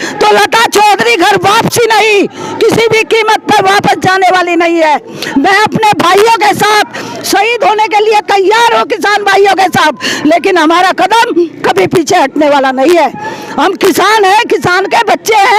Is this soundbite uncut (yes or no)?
yes